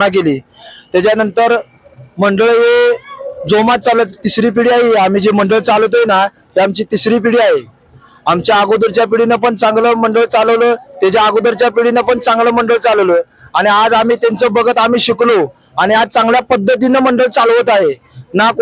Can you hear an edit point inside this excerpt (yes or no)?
no